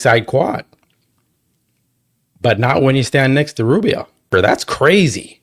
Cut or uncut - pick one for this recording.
cut